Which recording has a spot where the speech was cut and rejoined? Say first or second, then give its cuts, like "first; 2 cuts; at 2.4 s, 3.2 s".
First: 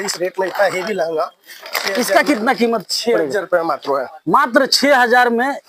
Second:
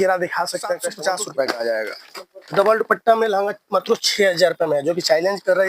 second; 2 cuts; at 0.9 s, 2.0 s